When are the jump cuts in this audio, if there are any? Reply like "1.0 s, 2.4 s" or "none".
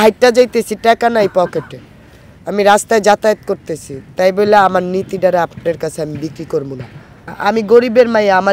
7.3 s